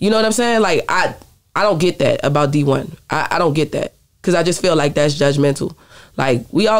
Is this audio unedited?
yes; 0 cuts

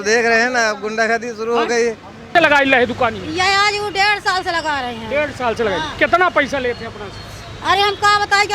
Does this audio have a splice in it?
yes; 1 cut; at 2.3 s

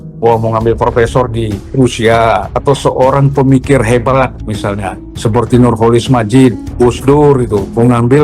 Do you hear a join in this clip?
yes; 4 cuts; at 1.6 s, 2.5 s, 4.5 s, 6.6 s

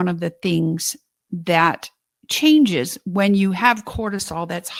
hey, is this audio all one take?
yes; 0 cuts

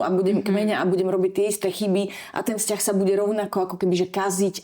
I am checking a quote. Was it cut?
no; 0 cuts

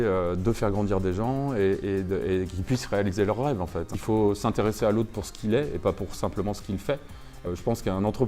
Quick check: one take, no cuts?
no; 2 cuts; at 3.9 s, 7.4 s

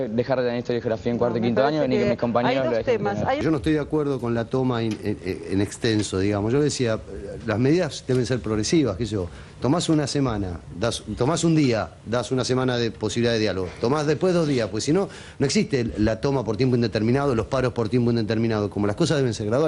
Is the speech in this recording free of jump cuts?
no; 1 cut; at 3.4 s

